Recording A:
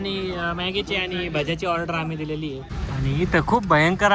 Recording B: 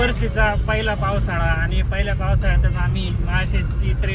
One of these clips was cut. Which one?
A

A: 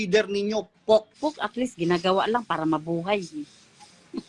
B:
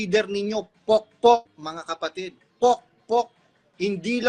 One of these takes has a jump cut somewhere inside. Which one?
A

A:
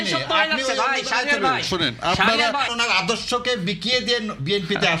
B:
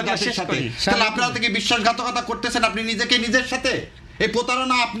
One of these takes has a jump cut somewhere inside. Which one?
A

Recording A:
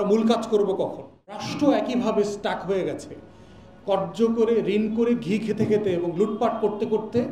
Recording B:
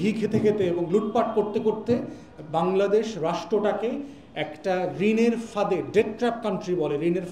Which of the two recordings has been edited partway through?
A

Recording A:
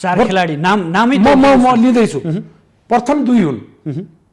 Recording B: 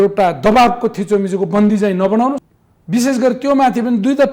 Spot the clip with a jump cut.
B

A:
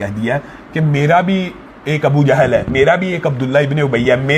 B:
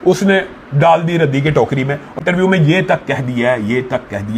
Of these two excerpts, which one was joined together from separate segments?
B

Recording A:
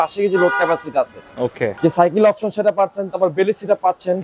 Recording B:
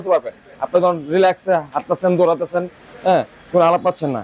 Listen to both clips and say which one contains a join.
A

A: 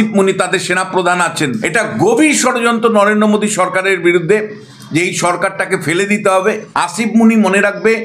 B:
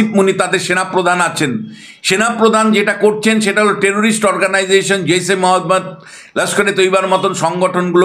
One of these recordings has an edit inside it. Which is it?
A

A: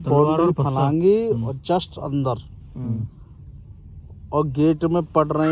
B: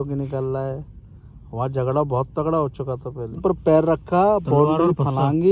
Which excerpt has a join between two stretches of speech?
B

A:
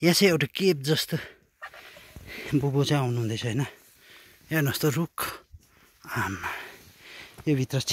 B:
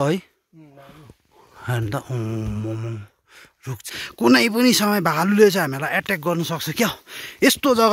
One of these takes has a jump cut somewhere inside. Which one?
B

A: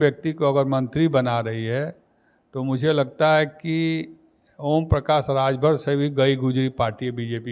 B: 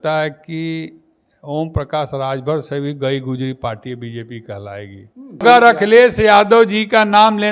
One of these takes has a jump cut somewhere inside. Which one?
B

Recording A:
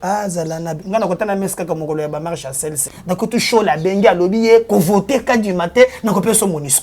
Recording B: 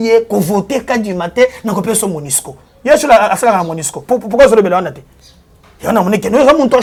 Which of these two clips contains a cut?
A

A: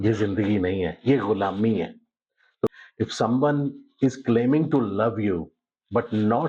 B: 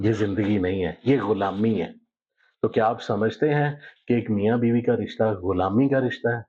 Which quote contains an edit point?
A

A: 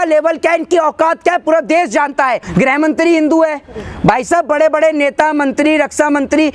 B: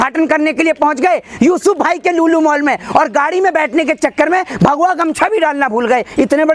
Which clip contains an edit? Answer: A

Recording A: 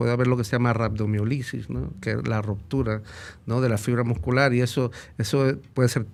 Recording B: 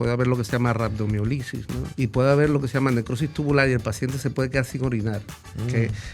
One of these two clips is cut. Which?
B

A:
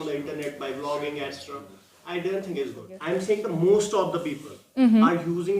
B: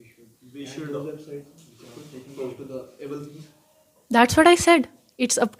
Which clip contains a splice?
A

